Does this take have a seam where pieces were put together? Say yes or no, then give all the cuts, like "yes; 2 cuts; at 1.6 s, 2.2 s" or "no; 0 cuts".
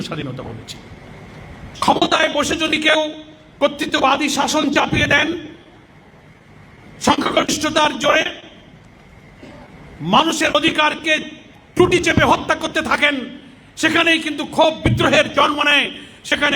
yes; 1 cut; at 1.7 s